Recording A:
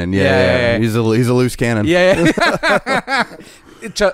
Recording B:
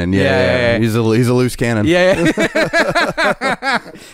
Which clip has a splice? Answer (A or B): A